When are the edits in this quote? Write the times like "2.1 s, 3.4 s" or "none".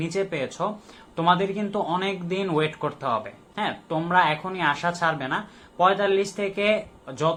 none